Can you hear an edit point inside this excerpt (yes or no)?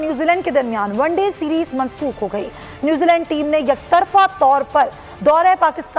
no